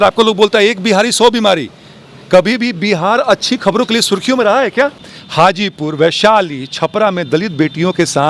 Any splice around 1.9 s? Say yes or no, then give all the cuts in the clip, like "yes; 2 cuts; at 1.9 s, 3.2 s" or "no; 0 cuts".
no; 1 cut; at 5.0 s